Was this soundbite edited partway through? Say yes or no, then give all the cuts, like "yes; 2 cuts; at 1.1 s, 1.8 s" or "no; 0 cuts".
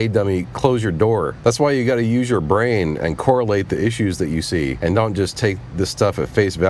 yes; 2 cuts; at 1.3 s, 4.8 s